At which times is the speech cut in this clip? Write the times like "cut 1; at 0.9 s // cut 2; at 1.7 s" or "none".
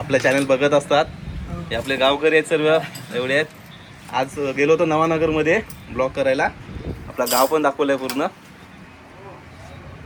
none